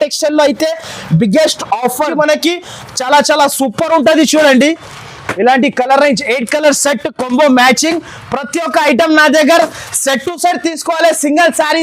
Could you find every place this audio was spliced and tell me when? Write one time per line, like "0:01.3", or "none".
0:02.1